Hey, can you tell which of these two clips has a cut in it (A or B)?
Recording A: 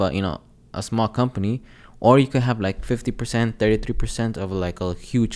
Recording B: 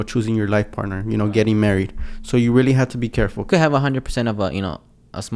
B